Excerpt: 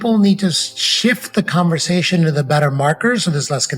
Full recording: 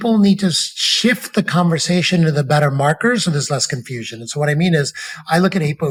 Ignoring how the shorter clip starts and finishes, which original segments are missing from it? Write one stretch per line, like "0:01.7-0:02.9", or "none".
none